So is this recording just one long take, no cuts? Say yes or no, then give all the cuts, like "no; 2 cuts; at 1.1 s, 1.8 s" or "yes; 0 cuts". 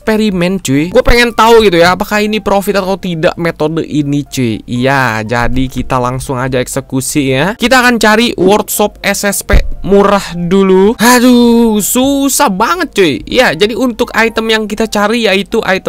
yes; 0 cuts